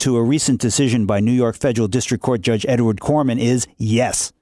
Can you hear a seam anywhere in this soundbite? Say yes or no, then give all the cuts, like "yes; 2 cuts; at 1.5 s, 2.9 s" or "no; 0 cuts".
no; 0 cuts